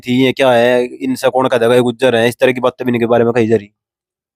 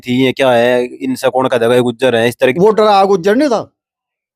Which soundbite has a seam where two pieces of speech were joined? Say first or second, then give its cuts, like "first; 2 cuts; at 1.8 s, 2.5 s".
second; 1 cut; at 2.5 s